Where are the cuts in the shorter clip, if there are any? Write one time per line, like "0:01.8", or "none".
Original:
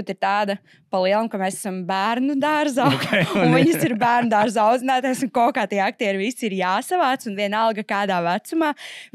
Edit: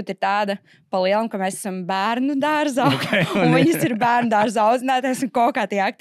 none